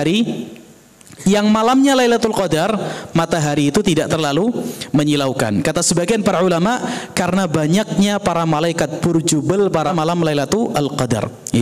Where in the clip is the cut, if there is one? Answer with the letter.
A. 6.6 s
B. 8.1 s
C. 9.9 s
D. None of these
C